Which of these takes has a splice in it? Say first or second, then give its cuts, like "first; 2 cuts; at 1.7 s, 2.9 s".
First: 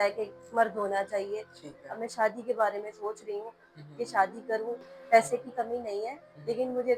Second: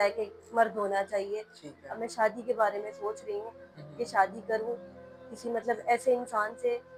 first; 1 cut; at 4.9 s